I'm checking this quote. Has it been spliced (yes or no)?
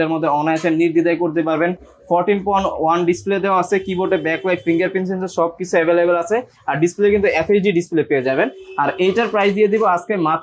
no